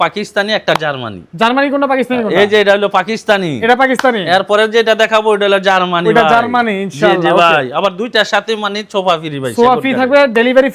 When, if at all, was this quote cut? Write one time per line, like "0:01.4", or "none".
none

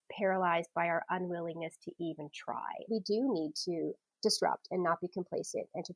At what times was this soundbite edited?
0:02.9
0:04.0

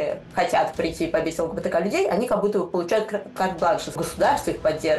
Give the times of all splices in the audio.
0:04.0

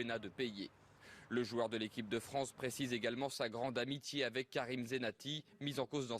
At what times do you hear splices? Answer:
0:03.8

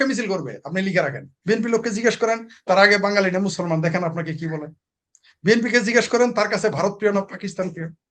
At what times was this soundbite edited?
0:01.3

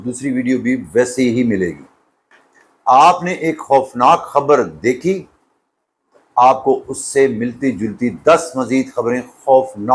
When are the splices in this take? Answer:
none

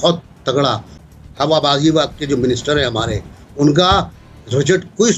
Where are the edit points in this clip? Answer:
0:00.9

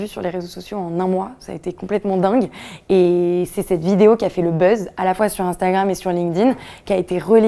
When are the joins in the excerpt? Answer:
none

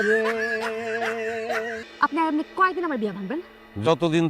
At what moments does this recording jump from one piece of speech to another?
0:01.8

